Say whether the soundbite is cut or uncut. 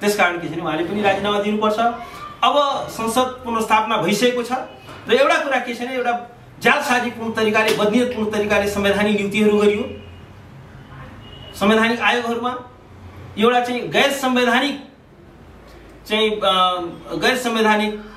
uncut